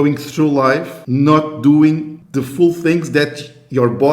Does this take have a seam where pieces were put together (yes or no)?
yes